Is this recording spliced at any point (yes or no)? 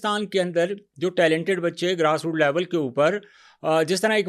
no